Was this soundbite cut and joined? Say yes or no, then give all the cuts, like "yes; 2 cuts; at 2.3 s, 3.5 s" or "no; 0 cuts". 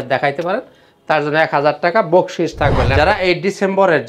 yes; 1 cut; at 2.9 s